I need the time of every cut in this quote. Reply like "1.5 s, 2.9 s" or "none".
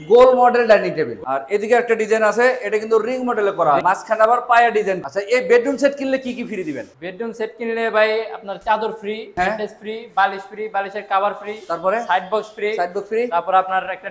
1.2 s, 3.8 s, 5.0 s, 9.3 s